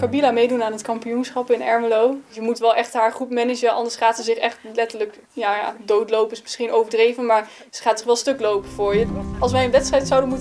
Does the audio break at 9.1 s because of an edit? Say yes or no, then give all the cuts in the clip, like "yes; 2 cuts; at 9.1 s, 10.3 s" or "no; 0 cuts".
yes; 2 cuts; at 2.4 s, 9.1 s